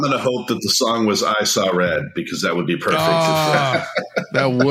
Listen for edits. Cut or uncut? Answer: uncut